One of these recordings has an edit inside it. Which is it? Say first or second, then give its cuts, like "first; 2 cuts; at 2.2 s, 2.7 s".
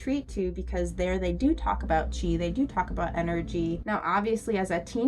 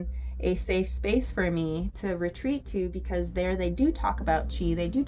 first; 1 cut; at 3.8 s